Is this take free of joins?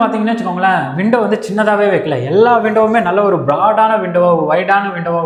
yes; 0 cuts

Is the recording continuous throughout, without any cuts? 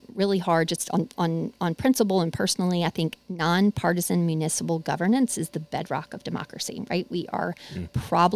yes; 0 cuts

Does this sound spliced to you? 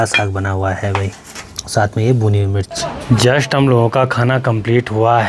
no; 0 cuts

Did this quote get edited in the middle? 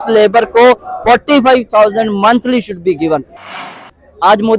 yes; 1 cut; at 3.4 s

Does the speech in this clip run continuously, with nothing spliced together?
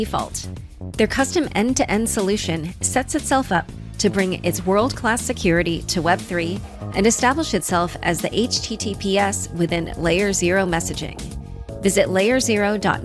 yes; 0 cuts

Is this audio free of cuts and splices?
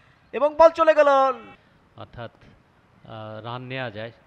no; 1 cut; at 1.5 s

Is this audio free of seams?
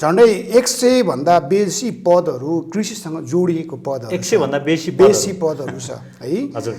yes; 0 cuts

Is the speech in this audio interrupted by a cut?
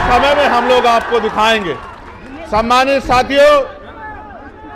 no; 0 cuts

